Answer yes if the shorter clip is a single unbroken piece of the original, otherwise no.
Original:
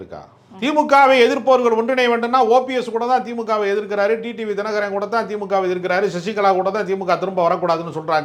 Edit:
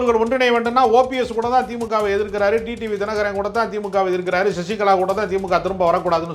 yes